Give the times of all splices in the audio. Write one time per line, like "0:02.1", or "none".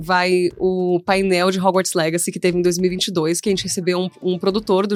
none